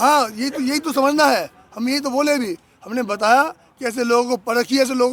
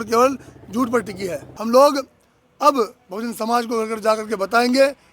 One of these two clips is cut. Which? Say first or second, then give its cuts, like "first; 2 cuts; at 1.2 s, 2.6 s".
second; 1 cut; at 1.5 s